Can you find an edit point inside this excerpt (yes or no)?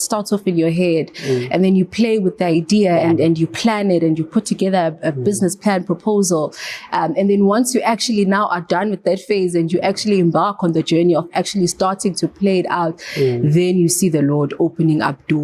yes